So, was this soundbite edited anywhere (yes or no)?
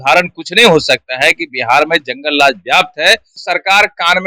yes